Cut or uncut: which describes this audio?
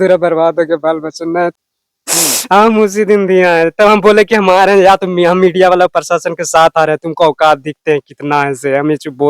cut